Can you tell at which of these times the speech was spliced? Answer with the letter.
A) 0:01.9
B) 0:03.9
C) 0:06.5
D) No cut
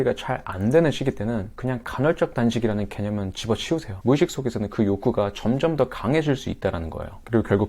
B